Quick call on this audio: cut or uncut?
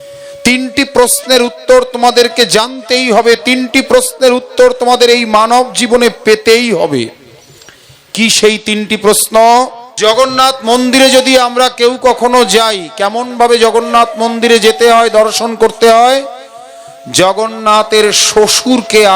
cut